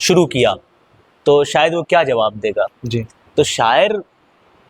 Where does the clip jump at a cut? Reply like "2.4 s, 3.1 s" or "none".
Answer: none